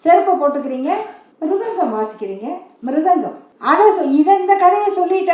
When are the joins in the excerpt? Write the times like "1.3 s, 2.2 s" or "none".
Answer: 1.2 s, 2.7 s, 3.5 s